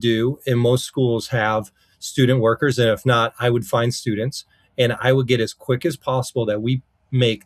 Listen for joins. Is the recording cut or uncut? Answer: uncut